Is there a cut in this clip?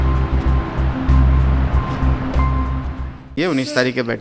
yes; 1 cut; at 3.3 s

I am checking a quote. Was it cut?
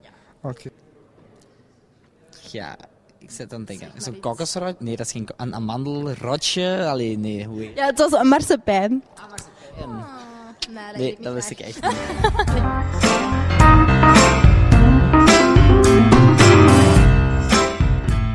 no; 0 cuts

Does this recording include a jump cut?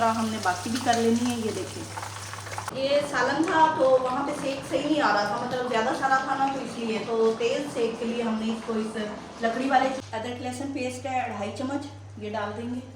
yes; 2 cuts; at 2.7 s, 10.0 s

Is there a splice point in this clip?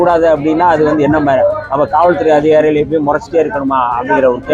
no; 0 cuts

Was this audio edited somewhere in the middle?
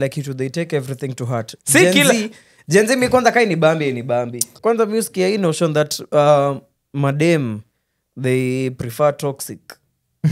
yes; 1 cut; at 4.5 s

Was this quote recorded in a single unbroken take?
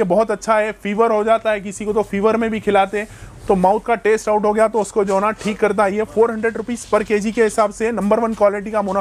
yes; 0 cuts

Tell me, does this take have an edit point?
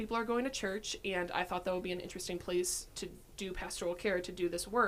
no; 0 cuts

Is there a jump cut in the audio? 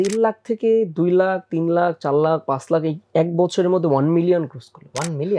no; 0 cuts

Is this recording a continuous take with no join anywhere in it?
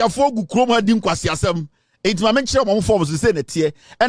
yes; 0 cuts

